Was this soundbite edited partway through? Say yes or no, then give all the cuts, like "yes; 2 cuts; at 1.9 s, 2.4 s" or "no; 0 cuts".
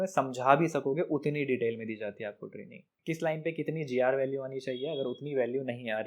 yes; 1 cut; at 2.9 s